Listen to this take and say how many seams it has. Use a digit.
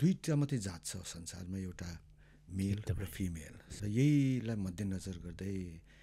1